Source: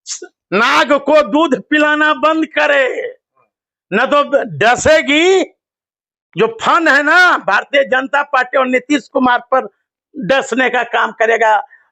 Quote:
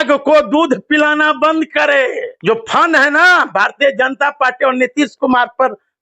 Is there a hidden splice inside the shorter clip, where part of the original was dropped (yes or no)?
yes